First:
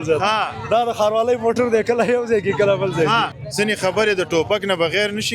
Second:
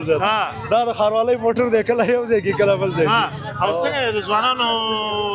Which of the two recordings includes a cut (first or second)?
first